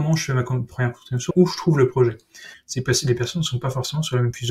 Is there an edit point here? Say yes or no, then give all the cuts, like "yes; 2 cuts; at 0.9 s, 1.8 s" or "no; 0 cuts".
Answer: yes; 2 cuts; at 1.3 s, 2.6 s